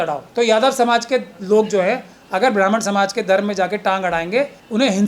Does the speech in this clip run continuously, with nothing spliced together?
yes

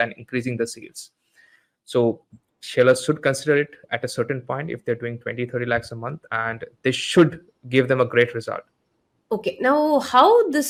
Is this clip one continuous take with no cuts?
yes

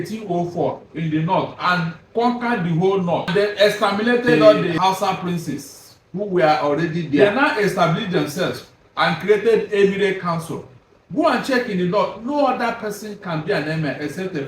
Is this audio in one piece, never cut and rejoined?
no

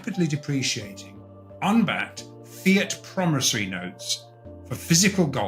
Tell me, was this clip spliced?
no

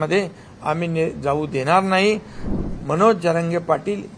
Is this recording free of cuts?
no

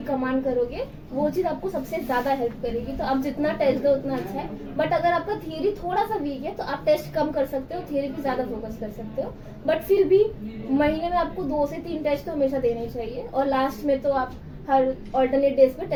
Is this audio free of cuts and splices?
yes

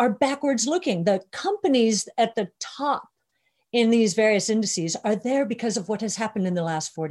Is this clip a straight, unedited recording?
yes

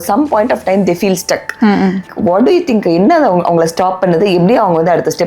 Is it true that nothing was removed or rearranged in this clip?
no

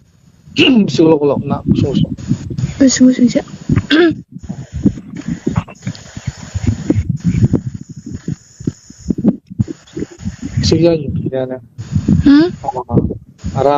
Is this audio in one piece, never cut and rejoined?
yes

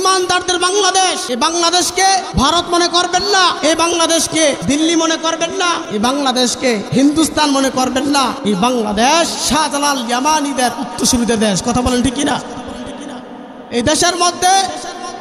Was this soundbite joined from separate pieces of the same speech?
yes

